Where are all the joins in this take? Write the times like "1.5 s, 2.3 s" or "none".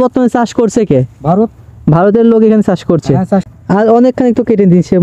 3.5 s